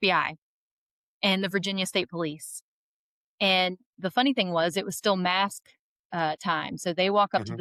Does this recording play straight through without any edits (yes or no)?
yes